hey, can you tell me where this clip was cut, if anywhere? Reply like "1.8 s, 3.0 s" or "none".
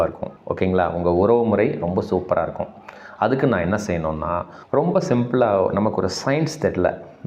4.5 s

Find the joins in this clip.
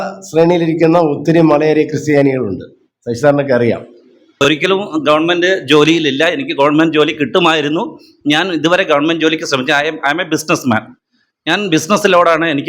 4.4 s

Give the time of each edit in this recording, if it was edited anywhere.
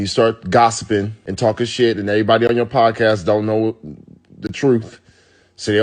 1.2 s

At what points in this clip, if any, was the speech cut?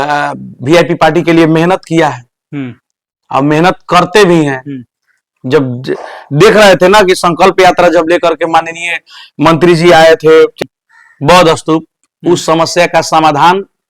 10.5 s

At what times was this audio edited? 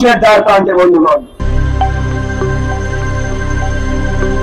none

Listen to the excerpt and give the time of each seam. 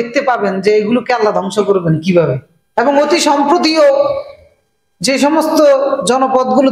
2.5 s

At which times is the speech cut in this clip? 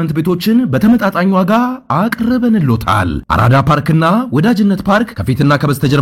none

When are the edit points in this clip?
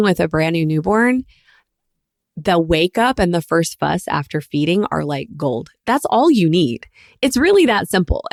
none

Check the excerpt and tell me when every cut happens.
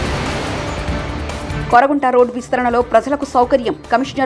1.5 s

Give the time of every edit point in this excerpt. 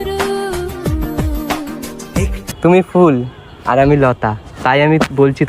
2.4 s

